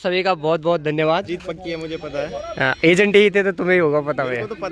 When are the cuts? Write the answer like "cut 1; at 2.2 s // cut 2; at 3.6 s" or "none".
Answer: cut 1; at 1.3 s